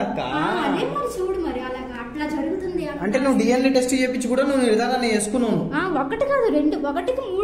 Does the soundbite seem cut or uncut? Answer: uncut